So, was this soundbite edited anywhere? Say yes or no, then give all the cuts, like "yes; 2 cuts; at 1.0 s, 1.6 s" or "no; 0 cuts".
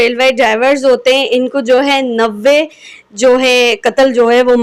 no; 0 cuts